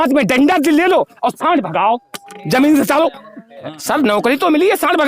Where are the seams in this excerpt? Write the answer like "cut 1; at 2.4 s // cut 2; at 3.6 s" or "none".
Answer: cut 1; at 3.8 s